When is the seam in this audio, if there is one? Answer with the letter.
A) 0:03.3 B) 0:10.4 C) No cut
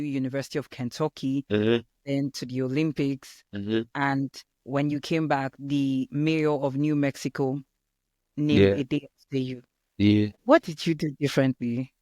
B